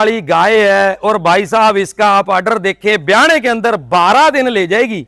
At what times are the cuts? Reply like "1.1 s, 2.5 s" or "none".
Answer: none